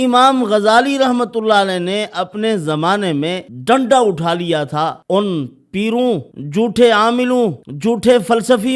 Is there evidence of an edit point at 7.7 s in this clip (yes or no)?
yes